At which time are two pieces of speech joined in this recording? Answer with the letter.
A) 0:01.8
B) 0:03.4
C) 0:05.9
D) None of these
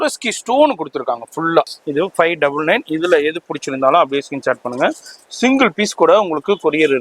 A